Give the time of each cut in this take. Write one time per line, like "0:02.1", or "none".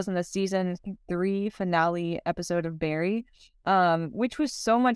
none